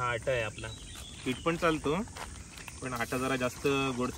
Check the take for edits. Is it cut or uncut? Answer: uncut